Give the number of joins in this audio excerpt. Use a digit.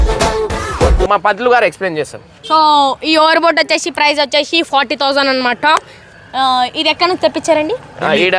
1